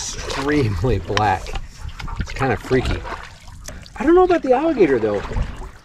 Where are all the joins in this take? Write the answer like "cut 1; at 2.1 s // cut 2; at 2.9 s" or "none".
cut 1; at 3.6 s